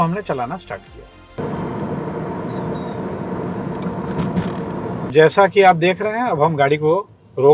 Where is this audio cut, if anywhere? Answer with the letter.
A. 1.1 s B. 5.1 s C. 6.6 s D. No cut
B